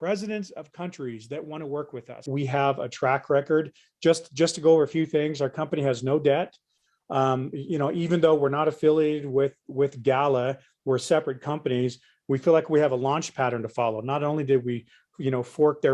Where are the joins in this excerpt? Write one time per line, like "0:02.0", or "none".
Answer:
0:02.2

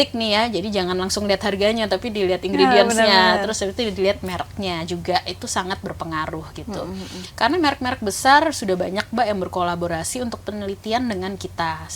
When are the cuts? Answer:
none

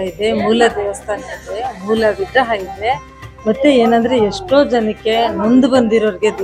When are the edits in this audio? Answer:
none

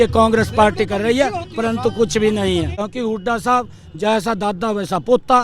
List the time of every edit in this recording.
0:02.8

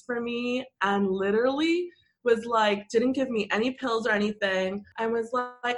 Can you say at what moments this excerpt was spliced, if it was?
0:04.9

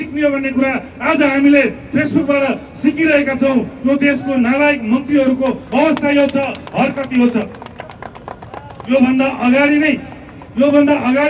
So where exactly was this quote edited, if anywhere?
none

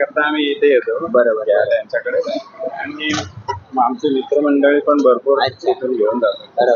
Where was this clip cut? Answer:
none

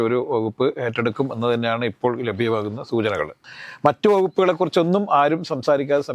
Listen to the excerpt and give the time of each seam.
0:03.4

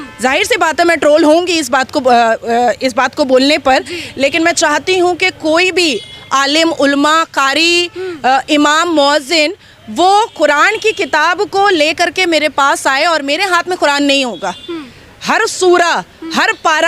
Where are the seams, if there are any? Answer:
none

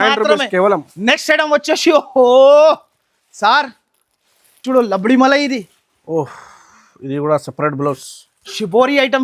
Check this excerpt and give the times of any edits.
none

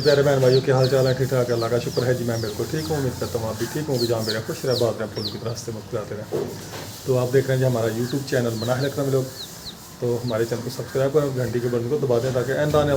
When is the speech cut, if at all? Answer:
none

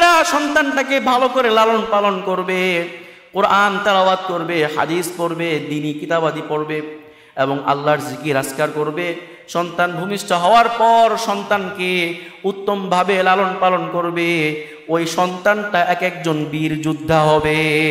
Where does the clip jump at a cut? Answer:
none

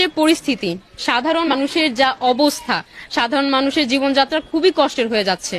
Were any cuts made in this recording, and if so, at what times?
0:01.5

